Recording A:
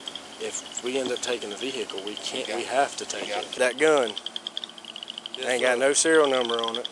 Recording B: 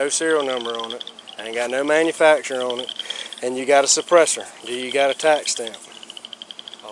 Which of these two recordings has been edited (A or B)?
A